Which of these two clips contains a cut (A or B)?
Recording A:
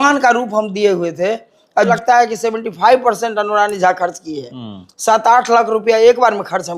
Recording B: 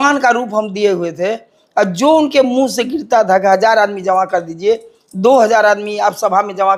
A